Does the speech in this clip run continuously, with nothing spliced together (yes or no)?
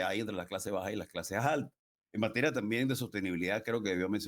yes